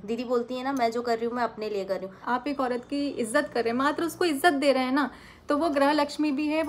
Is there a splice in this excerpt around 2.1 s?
yes; 1 cut; at 2.1 s

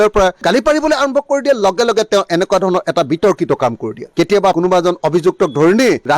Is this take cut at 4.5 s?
yes; 1 cut; at 4.5 s

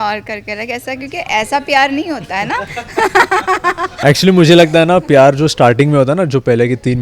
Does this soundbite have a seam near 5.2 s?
no; 1 cut; at 3.9 s

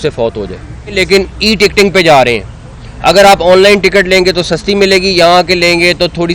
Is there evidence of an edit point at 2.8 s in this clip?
no; 1 cut; at 1.0 s

